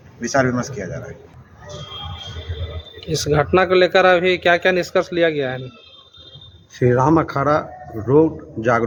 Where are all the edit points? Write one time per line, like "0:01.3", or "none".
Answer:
none